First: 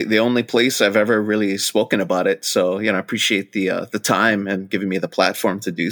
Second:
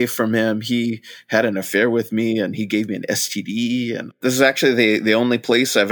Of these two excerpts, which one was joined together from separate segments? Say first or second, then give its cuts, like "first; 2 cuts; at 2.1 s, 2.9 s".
second; 1 cut; at 3.9 s